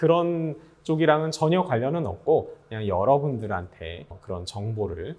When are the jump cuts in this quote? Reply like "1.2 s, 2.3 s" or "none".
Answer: 4.2 s

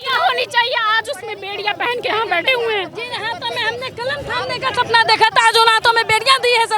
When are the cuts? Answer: none

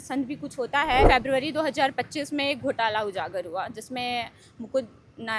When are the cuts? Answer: 1.1 s

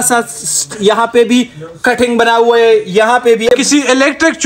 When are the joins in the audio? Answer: 3.5 s

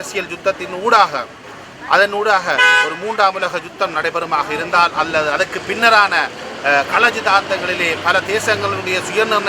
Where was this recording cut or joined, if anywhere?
none

